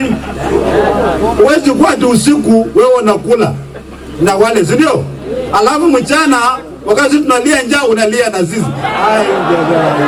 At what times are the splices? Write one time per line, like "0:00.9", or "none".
none